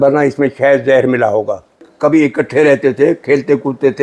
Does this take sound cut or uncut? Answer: cut